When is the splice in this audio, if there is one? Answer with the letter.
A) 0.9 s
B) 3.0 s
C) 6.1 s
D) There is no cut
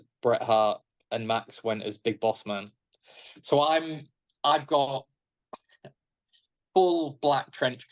A